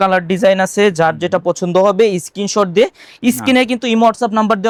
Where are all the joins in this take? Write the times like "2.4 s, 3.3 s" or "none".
none